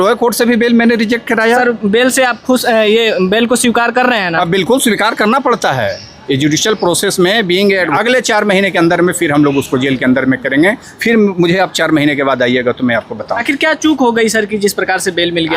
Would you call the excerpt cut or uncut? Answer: cut